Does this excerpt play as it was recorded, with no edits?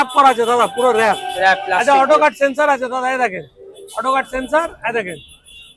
yes; 0 cuts

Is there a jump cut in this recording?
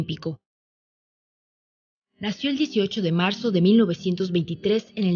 yes; 1 cut; at 2.4 s

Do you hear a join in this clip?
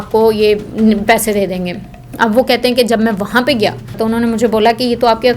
yes; 1 cut; at 4.0 s

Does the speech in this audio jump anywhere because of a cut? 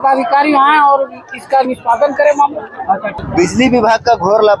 yes; 1 cut; at 3.2 s

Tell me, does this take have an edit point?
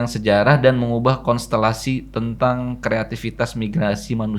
no; 0 cuts

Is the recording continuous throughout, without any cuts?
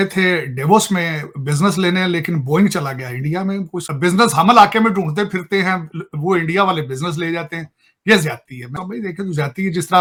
yes; 0 cuts

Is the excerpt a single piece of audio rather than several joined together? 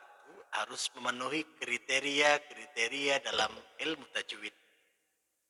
yes; 0 cuts

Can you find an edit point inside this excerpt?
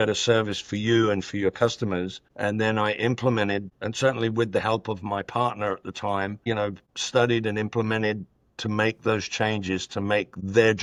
no; 0 cuts

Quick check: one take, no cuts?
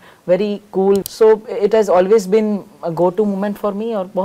no; 1 cut; at 1.0 s

